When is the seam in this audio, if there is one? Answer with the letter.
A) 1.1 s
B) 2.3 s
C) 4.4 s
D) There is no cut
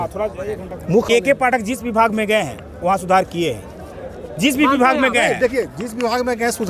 A